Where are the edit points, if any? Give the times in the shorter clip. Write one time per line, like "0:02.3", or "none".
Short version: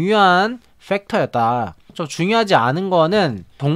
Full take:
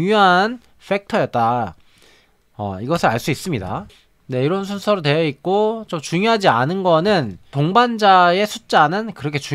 0:02.0